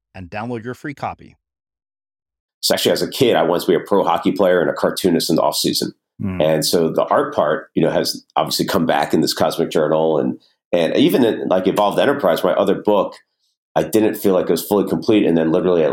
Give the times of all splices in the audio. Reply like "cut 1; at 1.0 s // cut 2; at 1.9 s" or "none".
cut 1; at 2.8 s // cut 2; at 6.9 s // cut 3; at 13.6 s